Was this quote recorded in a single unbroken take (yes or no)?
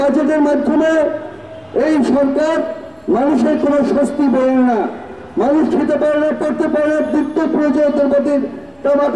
yes